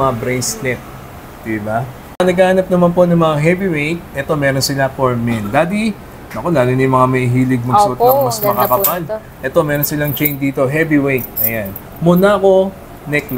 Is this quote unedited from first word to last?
no; 1 cut; at 2.0 s

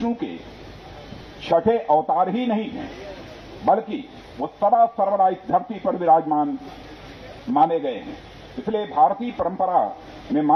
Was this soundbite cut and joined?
no; 0 cuts

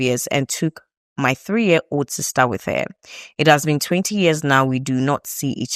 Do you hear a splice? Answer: no; 0 cuts

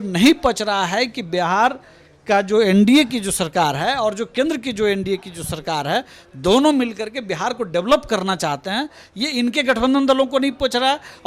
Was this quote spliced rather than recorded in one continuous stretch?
no; 0 cuts

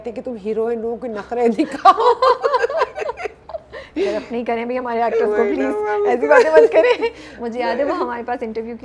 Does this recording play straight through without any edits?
yes; 0 cuts

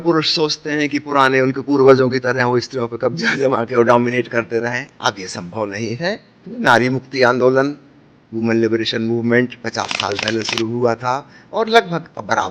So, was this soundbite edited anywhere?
no; 0 cuts

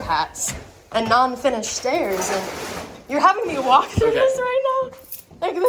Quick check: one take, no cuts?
yes; 0 cuts

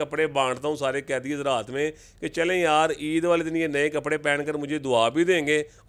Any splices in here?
no; 0 cuts

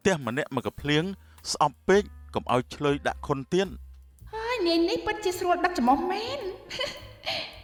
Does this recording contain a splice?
no; 0 cuts

